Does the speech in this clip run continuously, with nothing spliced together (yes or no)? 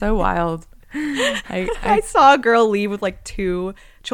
yes